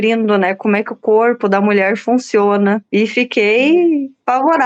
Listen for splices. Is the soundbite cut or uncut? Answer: uncut